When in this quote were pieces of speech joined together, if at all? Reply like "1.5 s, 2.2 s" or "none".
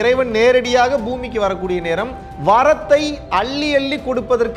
2.2 s